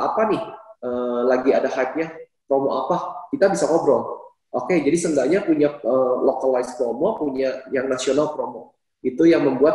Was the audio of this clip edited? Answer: no; 0 cuts

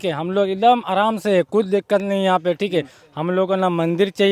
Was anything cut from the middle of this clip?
no; 0 cuts

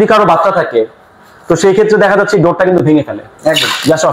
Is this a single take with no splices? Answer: yes; 0 cuts

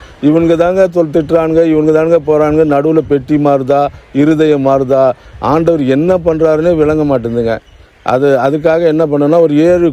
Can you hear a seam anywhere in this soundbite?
no; 0 cuts

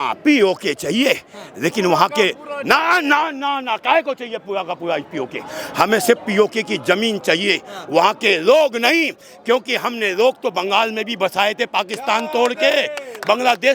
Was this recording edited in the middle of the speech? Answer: no; 0 cuts

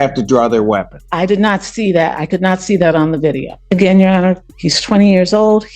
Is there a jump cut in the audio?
yes; 2 cuts; at 1.0 s, 3.5 s

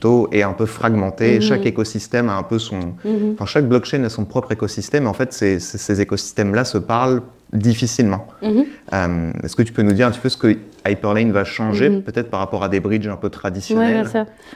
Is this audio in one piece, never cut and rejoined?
yes; 0 cuts

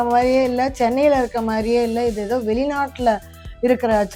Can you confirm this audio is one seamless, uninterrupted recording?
yes; 0 cuts

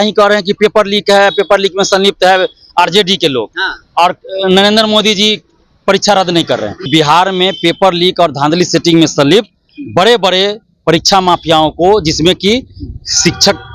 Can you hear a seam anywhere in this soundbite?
yes; 1 cut; at 6.9 s

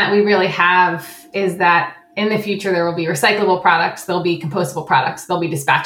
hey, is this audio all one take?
yes; 0 cuts

